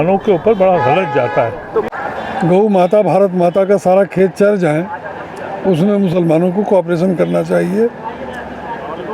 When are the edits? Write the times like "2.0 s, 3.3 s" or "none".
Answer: 1.9 s